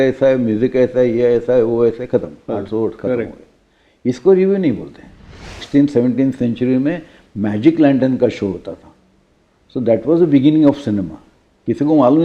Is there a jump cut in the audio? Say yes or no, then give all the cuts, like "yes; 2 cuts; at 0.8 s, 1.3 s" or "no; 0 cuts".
yes; 1 cut; at 5.6 s